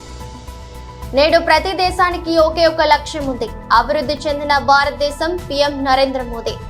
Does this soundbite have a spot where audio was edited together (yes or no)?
yes